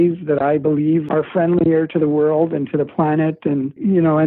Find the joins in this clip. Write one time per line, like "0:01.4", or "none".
0:01.1